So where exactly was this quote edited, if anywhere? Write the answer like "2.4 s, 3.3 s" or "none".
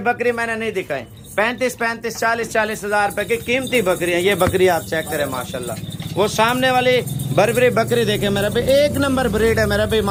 none